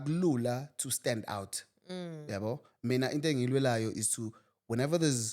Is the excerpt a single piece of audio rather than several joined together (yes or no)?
yes